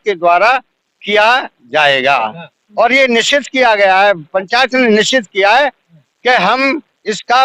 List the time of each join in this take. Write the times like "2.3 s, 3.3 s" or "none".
none